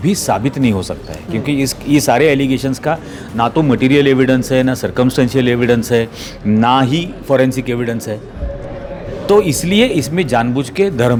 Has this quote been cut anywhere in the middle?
no; 0 cuts

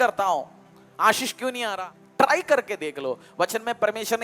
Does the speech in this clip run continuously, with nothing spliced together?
no; 1 cut; at 1.6 s

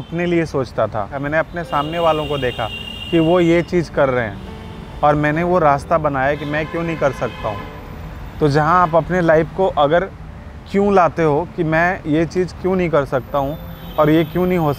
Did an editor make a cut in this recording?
yes; 1 cut; at 1.2 s

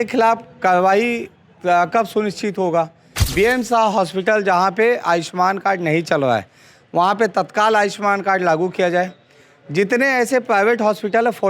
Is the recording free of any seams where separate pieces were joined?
no; 1 cut; at 3.2 s

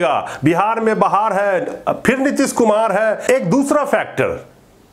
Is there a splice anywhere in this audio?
yes; 1 cut; at 3.3 s

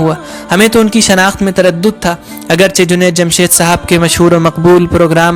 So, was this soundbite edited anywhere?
no; 0 cuts

